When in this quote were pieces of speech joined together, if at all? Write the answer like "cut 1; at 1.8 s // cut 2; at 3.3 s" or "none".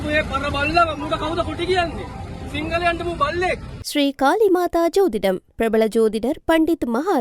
cut 1; at 3.8 s